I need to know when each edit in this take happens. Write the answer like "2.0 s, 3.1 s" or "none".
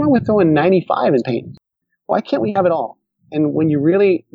1.8 s